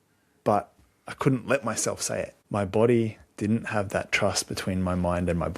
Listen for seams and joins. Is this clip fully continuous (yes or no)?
no